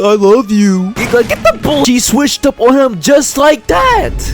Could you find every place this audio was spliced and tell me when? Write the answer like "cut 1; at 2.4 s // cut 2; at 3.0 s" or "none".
cut 1; at 1.9 s